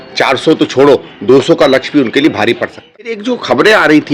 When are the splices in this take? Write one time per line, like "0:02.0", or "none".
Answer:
0:03.2